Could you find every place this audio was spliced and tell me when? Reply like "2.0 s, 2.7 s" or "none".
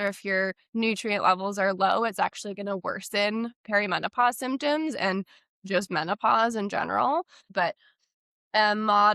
7.5 s